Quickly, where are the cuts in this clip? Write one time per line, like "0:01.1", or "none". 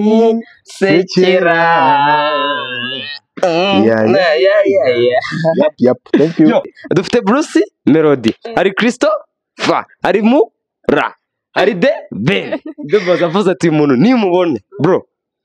0:06.8